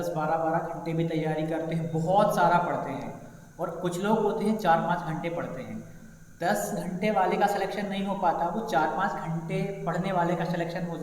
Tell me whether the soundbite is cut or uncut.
uncut